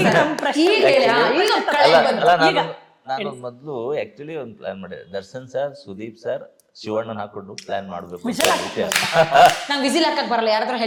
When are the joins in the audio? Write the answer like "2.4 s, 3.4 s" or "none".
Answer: none